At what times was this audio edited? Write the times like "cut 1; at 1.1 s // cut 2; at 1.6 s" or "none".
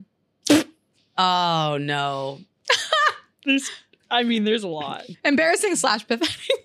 cut 1; at 0.9 s // cut 2; at 2.5 s // cut 3; at 5.0 s